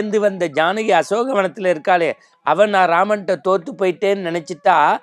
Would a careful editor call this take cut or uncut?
uncut